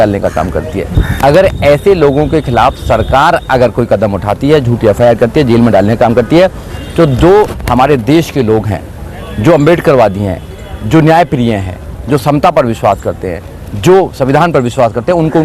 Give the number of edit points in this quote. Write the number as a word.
one